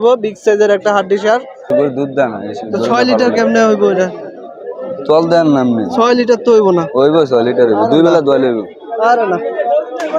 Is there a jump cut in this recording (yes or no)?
yes